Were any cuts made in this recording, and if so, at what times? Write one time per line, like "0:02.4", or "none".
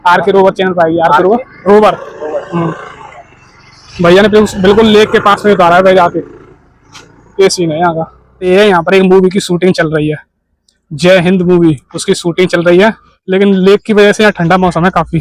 0:08.4
0:13.1